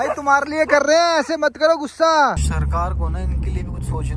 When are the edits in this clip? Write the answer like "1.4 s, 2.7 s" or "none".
2.4 s